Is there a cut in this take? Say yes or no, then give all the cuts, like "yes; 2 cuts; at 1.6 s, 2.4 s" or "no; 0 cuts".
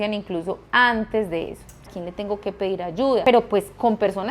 yes; 2 cuts; at 1.9 s, 3.2 s